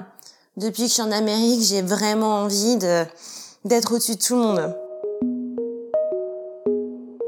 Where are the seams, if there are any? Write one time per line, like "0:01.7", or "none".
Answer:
0:04.8